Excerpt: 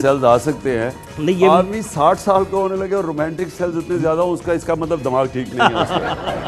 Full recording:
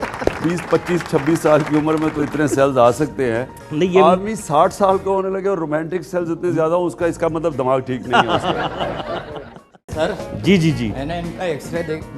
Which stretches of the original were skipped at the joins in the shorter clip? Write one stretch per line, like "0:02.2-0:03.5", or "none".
none